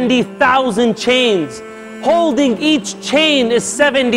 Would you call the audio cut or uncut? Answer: uncut